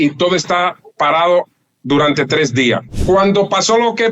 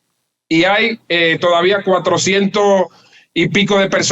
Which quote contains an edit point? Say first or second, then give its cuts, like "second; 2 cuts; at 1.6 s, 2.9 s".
first; 1 cut; at 2.9 s